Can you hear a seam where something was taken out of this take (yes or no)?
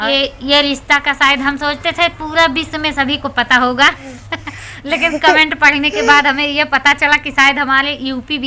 no